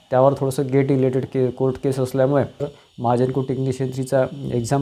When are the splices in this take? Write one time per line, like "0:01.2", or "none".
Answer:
0:02.7